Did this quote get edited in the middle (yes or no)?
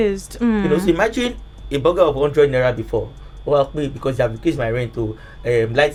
no